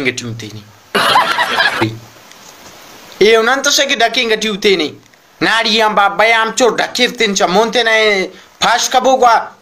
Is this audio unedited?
no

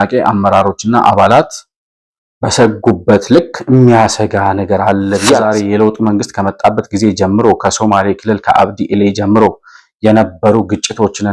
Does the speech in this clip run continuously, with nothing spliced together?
no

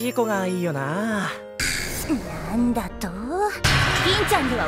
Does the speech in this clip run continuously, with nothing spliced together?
no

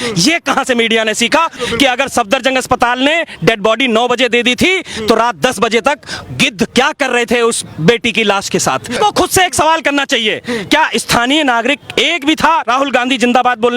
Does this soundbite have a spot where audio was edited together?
yes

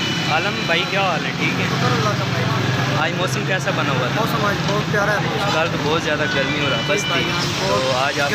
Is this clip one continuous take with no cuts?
yes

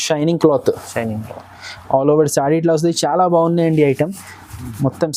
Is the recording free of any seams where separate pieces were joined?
yes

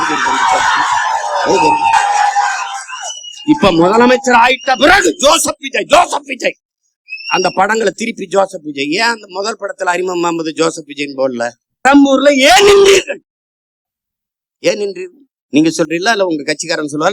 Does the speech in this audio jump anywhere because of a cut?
yes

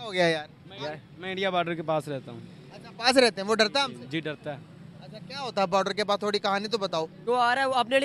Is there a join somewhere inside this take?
yes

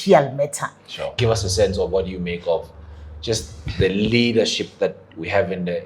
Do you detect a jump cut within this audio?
yes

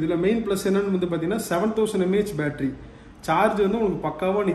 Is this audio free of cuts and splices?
yes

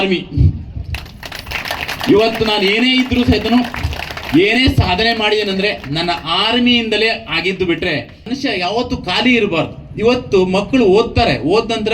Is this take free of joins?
no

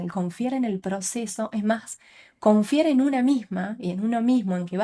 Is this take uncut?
yes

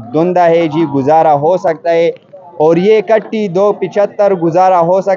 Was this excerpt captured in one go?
yes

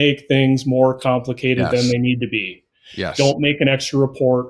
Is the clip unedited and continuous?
yes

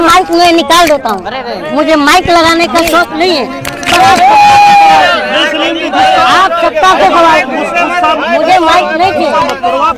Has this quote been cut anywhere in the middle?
no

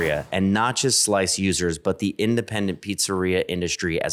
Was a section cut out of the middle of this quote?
no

